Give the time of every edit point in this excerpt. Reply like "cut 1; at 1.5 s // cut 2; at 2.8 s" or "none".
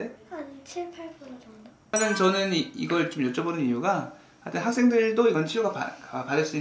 cut 1; at 1.7 s